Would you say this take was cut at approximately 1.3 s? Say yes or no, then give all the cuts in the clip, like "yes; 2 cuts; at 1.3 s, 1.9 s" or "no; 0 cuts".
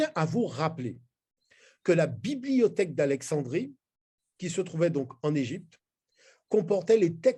no; 0 cuts